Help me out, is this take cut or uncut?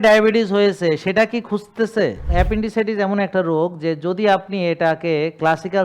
cut